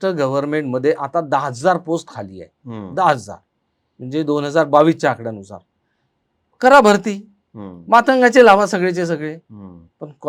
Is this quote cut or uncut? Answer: uncut